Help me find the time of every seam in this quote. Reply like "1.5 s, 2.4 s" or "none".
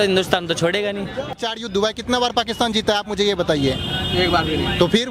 1.3 s